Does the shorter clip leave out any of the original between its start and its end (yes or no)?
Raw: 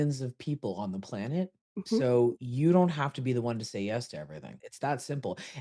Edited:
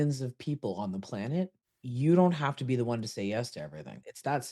yes